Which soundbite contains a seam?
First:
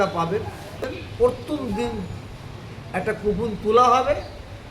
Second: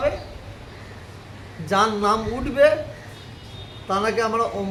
first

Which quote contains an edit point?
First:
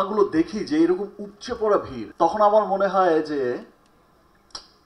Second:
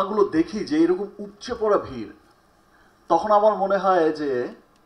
first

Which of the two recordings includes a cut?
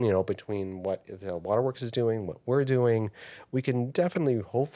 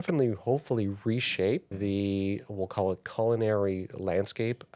second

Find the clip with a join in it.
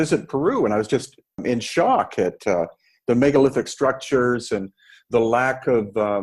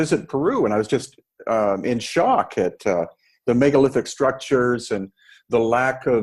first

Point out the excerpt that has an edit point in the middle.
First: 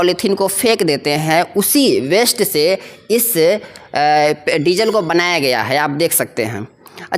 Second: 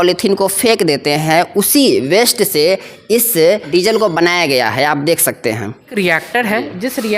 second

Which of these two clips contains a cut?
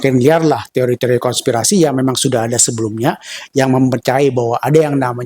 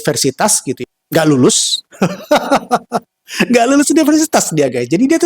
second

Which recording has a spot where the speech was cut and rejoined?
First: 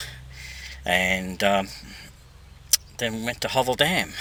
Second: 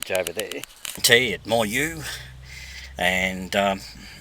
second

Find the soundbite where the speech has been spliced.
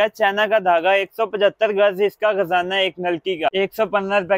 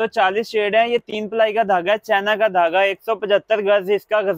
first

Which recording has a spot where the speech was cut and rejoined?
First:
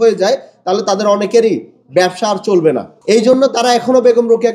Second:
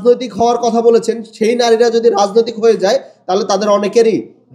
first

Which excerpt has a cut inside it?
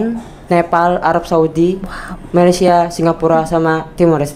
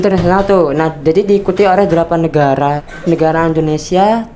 second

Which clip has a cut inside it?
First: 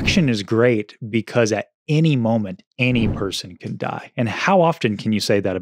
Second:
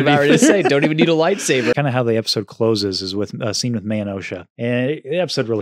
second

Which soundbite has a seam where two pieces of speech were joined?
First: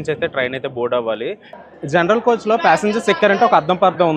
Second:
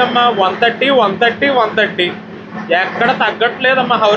first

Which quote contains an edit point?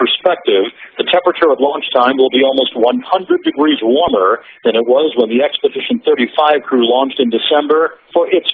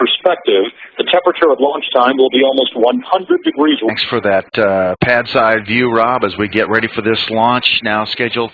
first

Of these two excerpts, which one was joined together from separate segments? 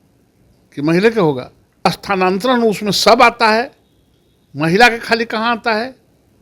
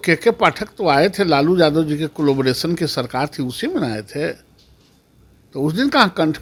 first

